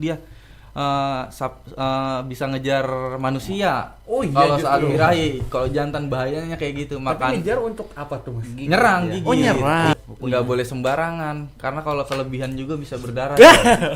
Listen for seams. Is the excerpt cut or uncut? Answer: cut